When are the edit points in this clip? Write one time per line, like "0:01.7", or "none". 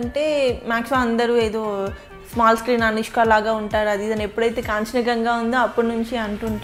none